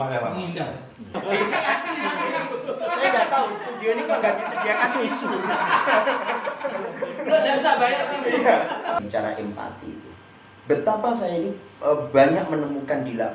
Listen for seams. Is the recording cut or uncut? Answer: cut